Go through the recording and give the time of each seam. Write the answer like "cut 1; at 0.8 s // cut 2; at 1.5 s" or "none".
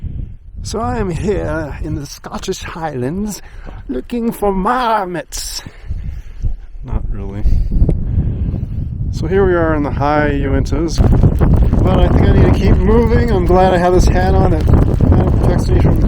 cut 1; at 11.0 s